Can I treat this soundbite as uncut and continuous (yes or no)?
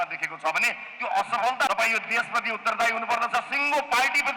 no